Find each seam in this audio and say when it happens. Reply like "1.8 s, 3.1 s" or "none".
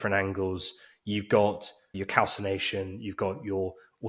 1.9 s